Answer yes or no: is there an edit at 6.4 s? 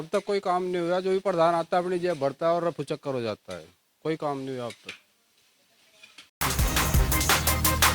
yes